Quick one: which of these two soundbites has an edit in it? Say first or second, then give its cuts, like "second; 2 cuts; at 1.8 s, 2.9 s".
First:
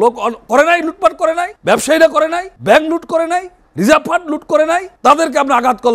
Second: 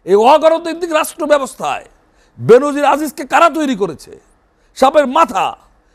first; 4 cuts; at 1.5 s, 2.5 s, 3.6 s, 4.9 s